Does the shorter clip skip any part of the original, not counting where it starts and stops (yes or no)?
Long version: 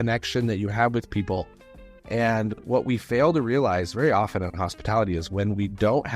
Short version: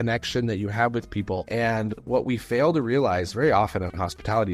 yes